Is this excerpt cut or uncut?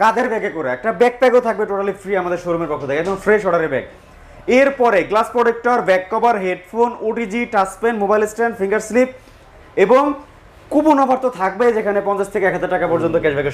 uncut